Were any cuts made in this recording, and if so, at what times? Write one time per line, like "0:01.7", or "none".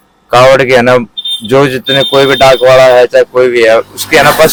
none